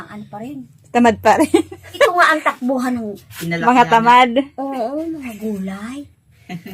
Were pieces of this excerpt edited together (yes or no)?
yes